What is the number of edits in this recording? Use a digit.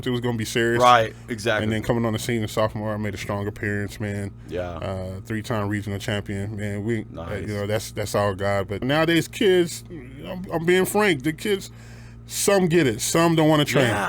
1